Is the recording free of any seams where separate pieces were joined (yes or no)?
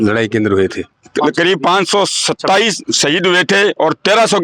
no